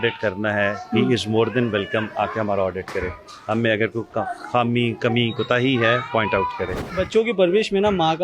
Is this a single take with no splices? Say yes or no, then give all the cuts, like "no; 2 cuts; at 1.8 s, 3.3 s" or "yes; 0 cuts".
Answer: no; 1 cut; at 6.8 s